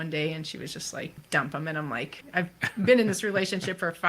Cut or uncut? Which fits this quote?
cut